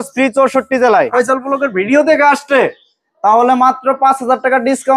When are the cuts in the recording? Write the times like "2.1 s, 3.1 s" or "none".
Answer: 1.1 s